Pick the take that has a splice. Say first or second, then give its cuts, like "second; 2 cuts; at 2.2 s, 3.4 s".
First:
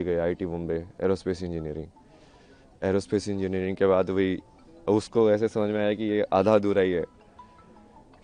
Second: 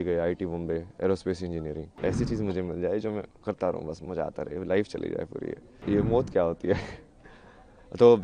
second; 2 cuts; at 1.9 s, 5.8 s